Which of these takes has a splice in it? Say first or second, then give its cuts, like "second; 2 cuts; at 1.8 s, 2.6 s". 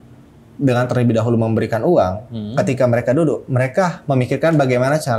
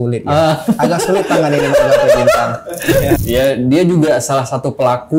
second; 1 cut; at 3.2 s